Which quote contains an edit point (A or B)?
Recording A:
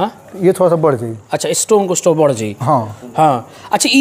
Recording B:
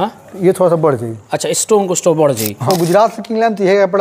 B